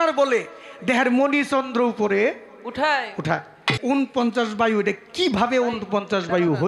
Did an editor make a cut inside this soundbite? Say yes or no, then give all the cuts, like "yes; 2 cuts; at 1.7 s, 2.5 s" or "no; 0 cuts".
yes; 1 cut; at 3.8 s